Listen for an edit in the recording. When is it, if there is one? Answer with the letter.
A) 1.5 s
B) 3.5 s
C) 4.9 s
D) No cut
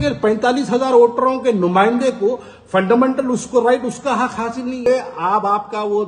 C